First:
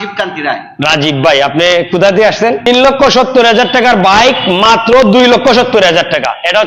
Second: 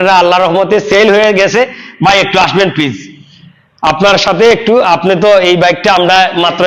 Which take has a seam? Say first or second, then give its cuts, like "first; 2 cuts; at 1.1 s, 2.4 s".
first; 1 cut; at 2.7 s